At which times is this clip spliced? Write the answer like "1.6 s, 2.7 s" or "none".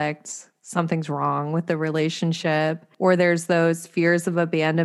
2.9 s